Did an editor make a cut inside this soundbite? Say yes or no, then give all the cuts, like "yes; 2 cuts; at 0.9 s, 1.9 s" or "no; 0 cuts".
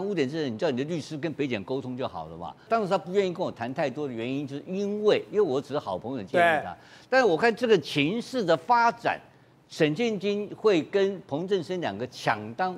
yes; 1 cut; at 2.6 s